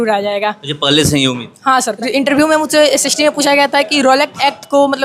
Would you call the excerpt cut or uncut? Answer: cut